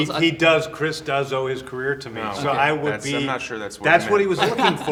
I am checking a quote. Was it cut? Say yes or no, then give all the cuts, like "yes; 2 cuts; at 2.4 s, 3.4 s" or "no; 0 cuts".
no; 0 cuts